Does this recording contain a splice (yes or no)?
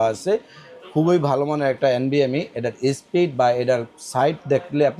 no